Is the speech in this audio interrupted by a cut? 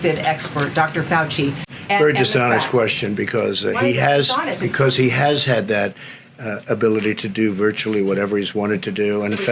yes; 1 cut; at 1.7 s

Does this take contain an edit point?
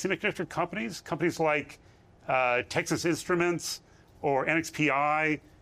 no; 0 cuts

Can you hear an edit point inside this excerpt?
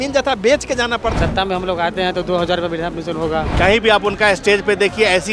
yes; 2 cuts; at 1.1 s, 3.5 s

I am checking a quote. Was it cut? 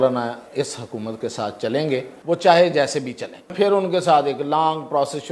yes; 2 cuts; at 2.1 s, 3.5 s

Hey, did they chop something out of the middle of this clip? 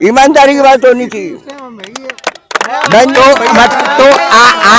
no; 0 cuts

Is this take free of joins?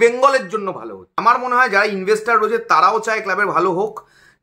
no; 1 cut; at 1.1 s

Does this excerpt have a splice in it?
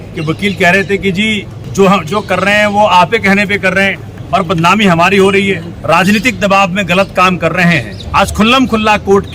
yes; 4 cuts; at 1.5 s, 4.1 s, 5.7 s, 8.0 s

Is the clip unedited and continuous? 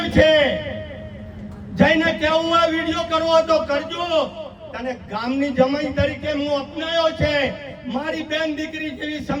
yes; 0 cuts

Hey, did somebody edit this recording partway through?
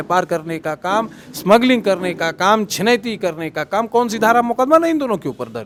no; 0 cuts

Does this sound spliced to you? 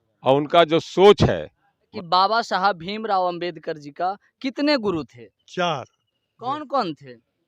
yes; 1 cut; at 1.9 s

